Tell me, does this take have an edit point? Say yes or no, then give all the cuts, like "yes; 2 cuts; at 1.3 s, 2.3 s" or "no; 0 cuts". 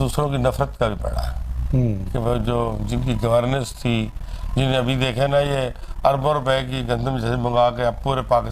no; 0 cuts